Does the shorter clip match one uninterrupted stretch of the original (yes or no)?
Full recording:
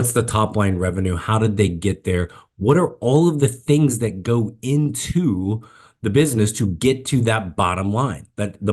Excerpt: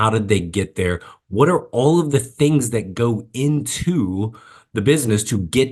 yes